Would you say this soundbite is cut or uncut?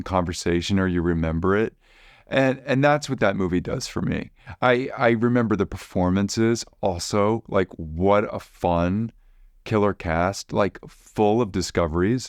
uncut